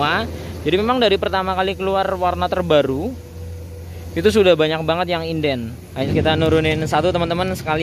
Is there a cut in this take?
yes; 1 cut; at 6.1 s

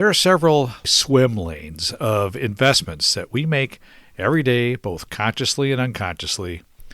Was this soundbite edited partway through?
yes; 1 cut; at 0.9 s

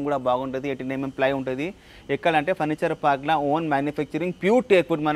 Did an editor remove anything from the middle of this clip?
no; 0 cuts

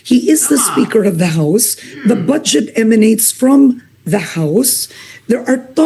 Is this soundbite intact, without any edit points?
yes; 0 cuts

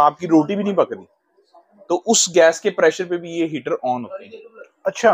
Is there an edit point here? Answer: no; 0 cuts

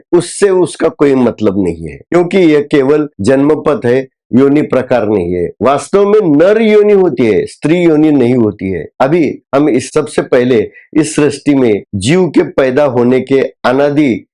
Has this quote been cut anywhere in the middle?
no; 0 cuts

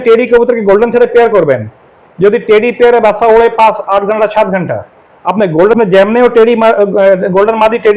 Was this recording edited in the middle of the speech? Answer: yes; 1 cut; at 5.8 s

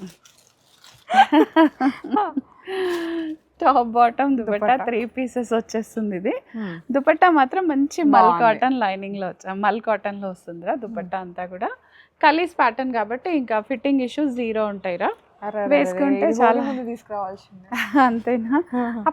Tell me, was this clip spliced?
no; 0 cuts

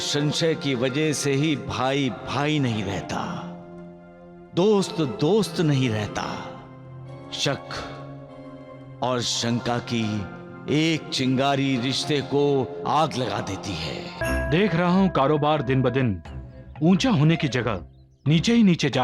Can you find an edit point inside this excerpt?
yes; 1 cut; at 14.2 s

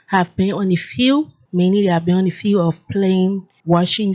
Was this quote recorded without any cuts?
yes; 0 cuts

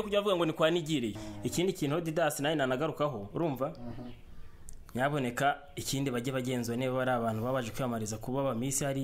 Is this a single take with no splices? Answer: no; 1 cut; at 1.2 s

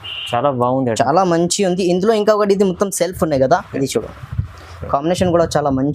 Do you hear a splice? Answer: yes; 1 cut; at 3.7 s

